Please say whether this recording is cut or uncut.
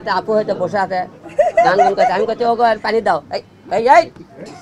uncut